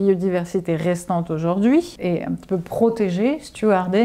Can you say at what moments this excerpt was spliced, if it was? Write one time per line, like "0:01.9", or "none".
0:02.0